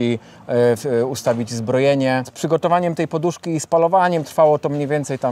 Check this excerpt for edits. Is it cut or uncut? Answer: cut